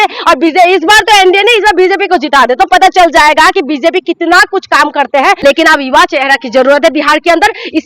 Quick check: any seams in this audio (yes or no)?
yes